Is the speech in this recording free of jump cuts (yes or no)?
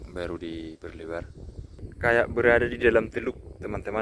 no